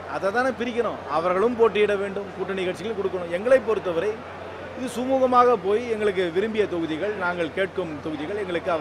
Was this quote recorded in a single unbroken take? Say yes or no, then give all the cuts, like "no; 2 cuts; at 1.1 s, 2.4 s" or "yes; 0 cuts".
yes; 0 cuts